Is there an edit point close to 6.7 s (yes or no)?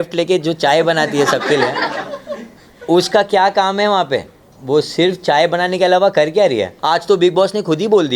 yes